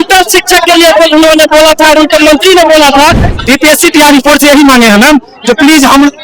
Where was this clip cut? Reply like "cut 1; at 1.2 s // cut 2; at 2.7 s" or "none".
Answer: cut 1; at 3.3 s